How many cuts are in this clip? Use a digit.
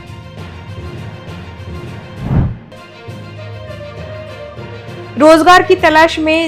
0